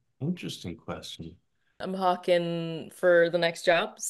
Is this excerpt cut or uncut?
cut